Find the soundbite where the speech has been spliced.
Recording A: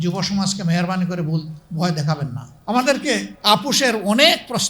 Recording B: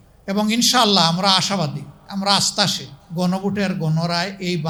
A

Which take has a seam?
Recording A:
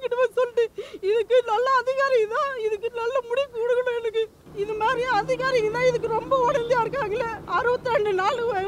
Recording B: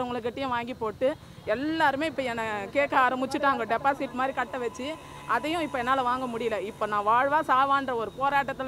A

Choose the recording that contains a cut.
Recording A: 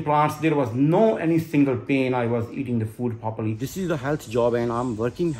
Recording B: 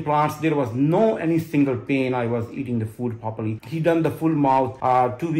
A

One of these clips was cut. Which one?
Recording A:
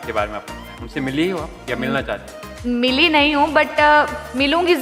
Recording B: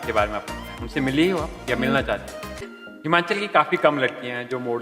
B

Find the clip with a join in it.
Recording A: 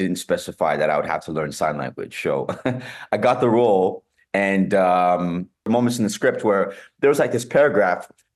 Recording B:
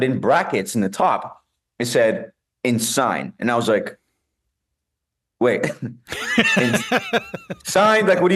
A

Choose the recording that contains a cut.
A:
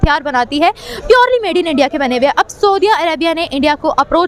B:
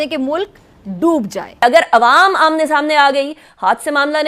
B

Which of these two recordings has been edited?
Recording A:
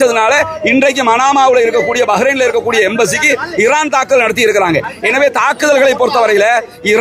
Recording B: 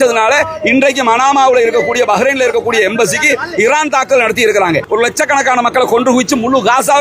B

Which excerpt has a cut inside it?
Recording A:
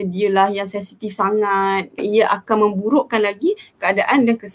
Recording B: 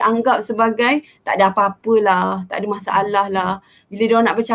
A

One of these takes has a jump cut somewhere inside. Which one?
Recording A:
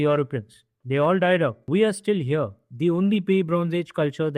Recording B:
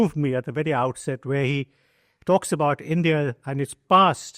A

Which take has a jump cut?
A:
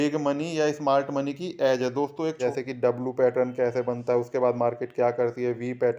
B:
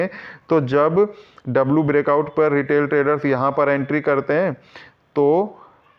A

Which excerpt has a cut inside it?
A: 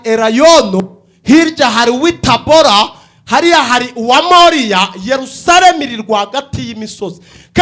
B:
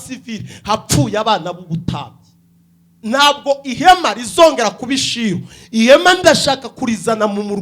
B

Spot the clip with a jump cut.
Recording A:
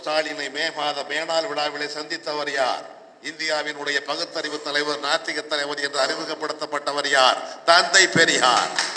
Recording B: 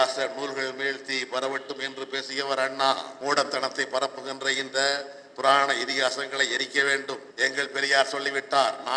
B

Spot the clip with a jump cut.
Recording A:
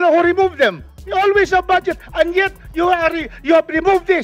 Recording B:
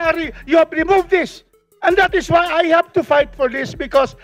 A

